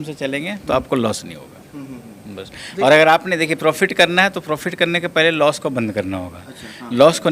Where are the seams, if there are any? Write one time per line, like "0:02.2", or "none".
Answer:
none